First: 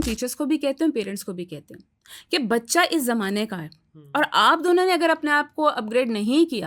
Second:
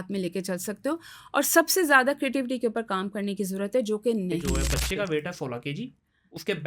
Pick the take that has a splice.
second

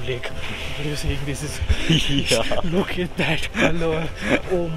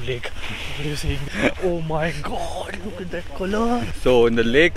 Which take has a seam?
second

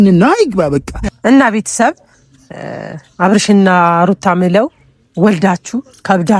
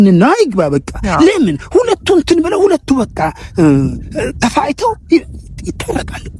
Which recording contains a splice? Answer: first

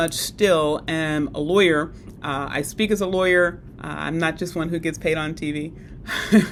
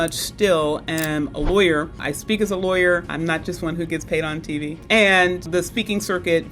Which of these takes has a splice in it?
second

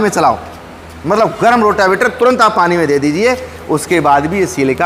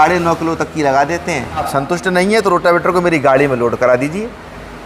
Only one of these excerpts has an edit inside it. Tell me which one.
second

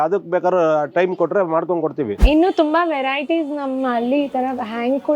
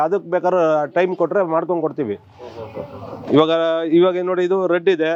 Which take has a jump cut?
first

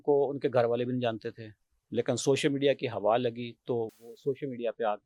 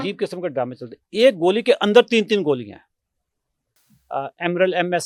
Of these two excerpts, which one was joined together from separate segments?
second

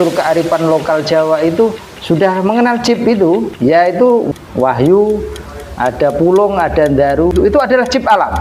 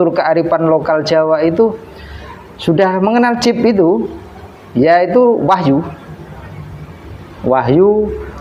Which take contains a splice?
first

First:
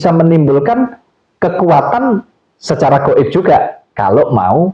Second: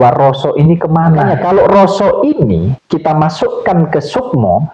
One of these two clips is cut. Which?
second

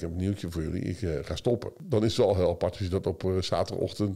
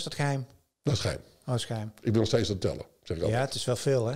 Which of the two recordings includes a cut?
first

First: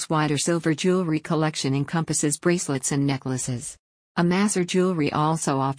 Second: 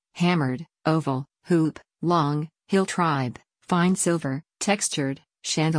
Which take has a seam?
second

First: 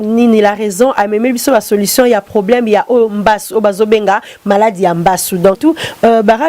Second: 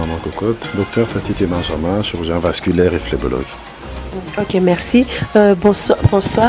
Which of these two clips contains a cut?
first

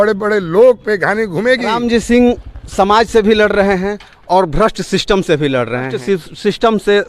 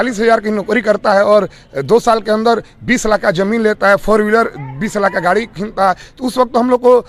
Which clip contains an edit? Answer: first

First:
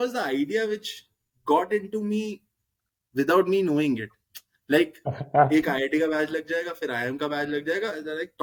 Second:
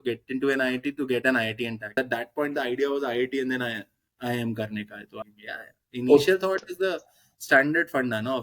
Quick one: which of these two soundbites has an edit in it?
second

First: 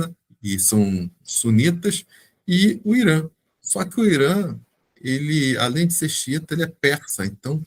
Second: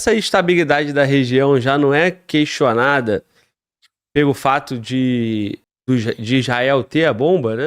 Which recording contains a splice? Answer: second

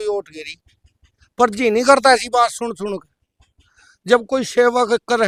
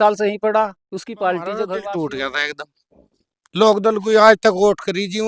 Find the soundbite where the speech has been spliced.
second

